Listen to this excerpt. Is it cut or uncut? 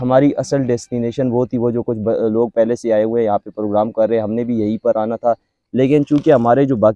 uncut